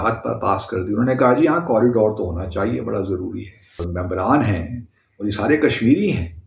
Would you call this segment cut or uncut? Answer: cut